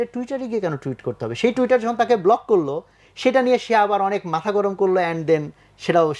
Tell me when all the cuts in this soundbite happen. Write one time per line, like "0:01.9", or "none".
none